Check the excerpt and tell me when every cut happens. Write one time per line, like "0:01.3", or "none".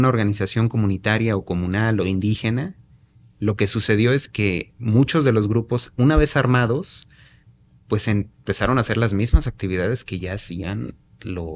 none